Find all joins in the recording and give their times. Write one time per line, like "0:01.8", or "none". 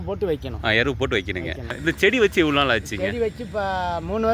0:01.8